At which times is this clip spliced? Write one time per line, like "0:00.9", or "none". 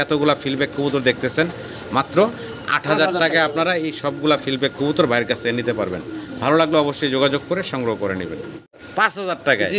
0:08.8